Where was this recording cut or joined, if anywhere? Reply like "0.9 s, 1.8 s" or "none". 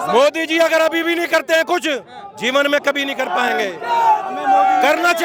none

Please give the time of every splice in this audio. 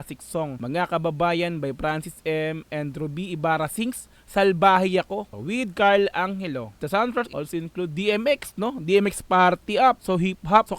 7.3 s

